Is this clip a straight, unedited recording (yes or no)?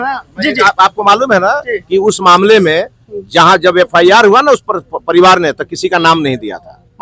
yes